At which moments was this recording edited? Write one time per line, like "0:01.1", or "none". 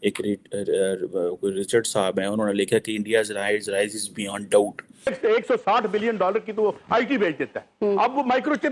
0:05.1